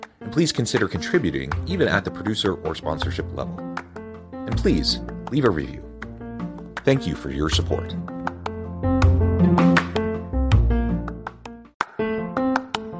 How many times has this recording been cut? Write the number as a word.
one